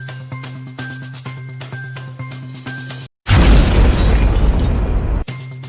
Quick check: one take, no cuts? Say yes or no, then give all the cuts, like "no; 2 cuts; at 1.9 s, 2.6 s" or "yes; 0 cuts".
yes; 0 cuts